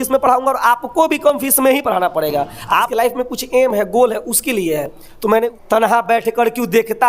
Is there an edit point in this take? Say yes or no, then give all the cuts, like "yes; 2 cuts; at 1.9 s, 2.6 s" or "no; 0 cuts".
yes; 2 cuts; at 2.9 s, 5.6 s